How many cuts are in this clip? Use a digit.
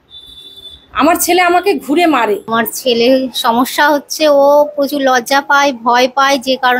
1